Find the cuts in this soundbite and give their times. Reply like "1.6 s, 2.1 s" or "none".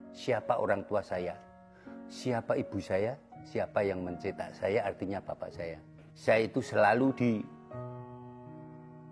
6.1 s